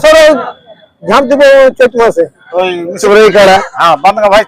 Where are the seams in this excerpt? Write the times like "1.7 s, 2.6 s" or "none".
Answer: 3.0 s